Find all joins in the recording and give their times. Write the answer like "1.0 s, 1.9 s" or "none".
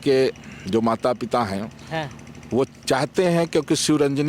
none